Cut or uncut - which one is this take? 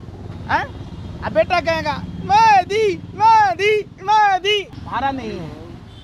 cut